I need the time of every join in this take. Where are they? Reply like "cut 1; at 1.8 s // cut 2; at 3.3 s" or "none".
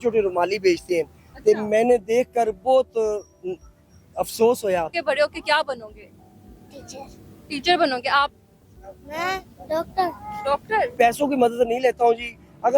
cut 1; at 4.9 s // cut 2; at 10.9 s